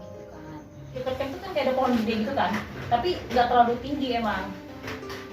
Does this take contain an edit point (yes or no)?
yes